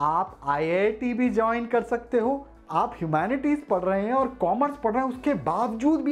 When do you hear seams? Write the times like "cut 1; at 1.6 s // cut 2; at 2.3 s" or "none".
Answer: cut 1; at 2.6 s